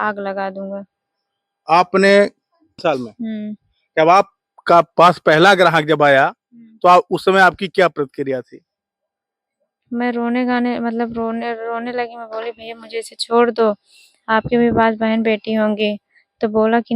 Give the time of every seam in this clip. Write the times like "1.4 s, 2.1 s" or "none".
2.8 s